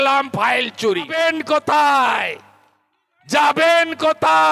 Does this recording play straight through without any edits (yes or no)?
no